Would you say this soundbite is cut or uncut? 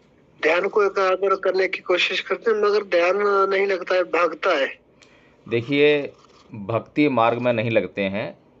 uncut